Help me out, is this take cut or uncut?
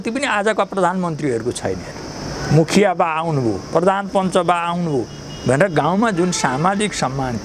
uncut